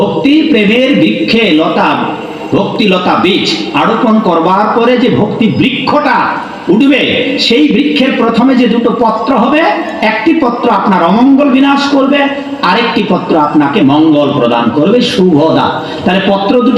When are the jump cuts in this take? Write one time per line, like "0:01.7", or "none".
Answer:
none

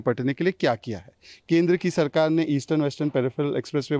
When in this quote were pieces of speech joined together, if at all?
none

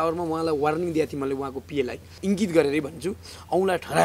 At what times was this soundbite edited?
0:02.1

